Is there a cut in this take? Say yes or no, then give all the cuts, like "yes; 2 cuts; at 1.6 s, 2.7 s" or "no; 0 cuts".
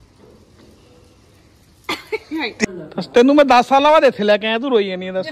yes; 1 cut; at 2.6 s